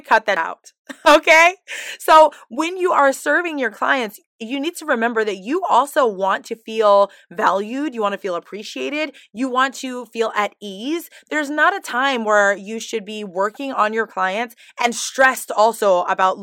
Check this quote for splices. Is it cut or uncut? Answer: uncut